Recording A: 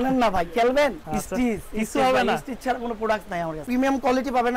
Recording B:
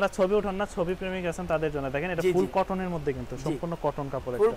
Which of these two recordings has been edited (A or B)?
A